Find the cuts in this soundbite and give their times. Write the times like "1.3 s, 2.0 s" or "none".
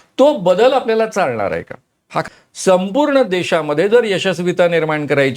2.3 s